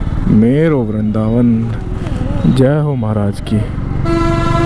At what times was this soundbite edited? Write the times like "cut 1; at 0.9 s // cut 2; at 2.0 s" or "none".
none